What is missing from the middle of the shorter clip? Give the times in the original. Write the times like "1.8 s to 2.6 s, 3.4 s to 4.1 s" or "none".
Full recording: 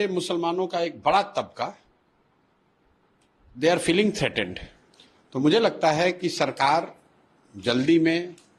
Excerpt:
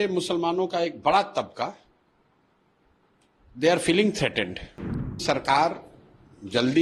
5.2 s to 6.3 s